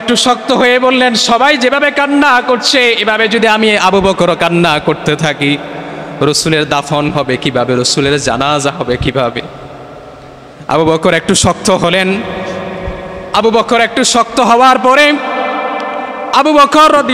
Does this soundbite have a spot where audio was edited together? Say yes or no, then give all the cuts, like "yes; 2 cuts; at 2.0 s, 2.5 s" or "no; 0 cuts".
no; 0 cuts